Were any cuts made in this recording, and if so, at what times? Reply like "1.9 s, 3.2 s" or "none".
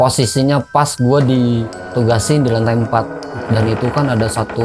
none